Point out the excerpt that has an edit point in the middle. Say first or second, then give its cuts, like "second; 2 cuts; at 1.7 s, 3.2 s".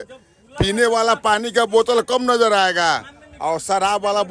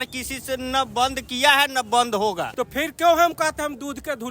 second; 1 cut; at 2.5 s